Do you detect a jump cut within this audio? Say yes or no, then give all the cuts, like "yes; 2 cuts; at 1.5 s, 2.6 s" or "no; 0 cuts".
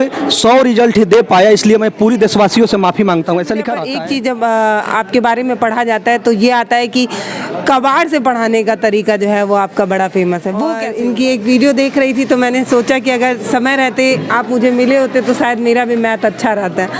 yes; 2 cuts; at 3.8 s, 10.8 s